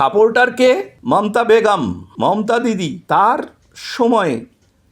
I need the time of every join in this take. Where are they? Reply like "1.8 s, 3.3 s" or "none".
0.9 s, 2.0 s, 3.0 s